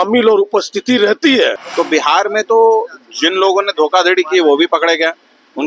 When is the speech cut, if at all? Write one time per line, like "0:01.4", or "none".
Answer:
0:01.6

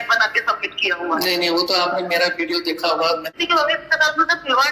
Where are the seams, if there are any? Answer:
0:03.4

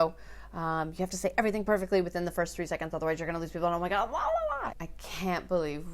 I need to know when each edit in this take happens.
0:04.8

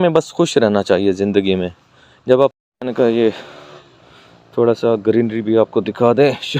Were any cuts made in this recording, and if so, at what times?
0:02.5

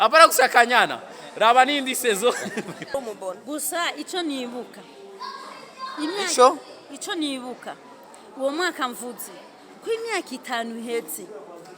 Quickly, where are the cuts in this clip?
0:02.9

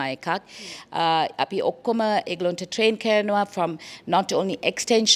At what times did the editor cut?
none

